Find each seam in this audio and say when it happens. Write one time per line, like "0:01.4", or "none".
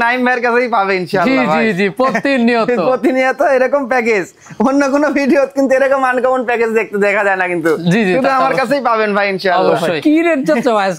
0:09.9